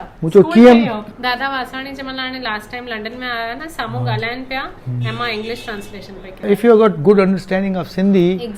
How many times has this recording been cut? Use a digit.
2